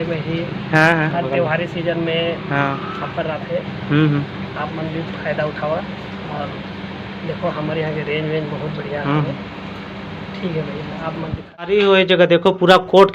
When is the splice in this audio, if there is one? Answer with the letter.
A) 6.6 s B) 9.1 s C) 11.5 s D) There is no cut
C